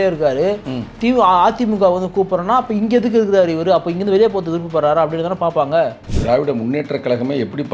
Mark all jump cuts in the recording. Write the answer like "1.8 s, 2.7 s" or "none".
6.1 s